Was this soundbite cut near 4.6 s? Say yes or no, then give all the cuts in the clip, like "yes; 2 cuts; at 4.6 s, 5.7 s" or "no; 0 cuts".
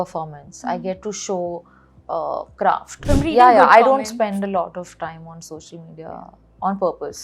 no; 1 cut; at 3.0 s